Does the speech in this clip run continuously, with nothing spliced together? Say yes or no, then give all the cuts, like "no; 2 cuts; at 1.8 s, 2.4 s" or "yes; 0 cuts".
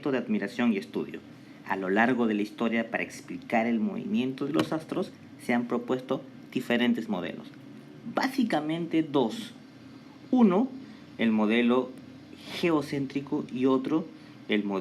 no; 1 cut; at 4.5 s